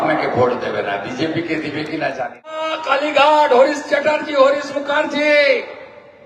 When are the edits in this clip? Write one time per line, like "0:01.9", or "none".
0:02.7